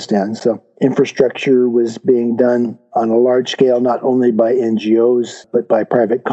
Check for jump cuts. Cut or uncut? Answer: cut